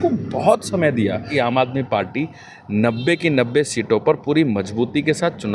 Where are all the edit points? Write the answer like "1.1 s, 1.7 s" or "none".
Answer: 1.3 s